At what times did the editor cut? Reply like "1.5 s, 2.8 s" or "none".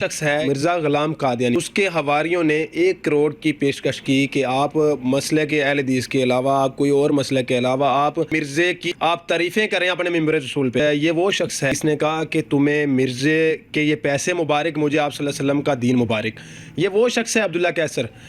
none